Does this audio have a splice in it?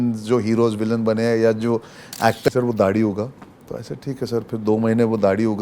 yes; 1 cut; at 2.5 s

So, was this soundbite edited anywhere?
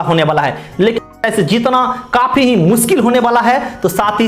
yes; 1 cut; at 1.0 s

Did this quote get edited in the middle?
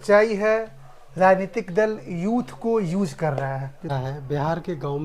yes; 1 cut; at 3.9 s

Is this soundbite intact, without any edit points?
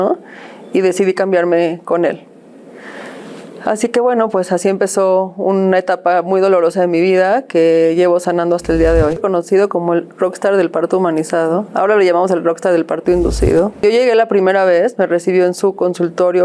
no; 2 cuts; at 9.2 s, 13.8 s

